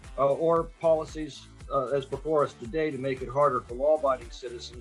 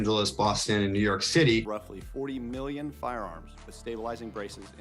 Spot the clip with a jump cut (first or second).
second